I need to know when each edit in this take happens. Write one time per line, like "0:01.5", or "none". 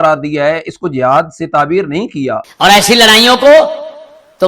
0:02.5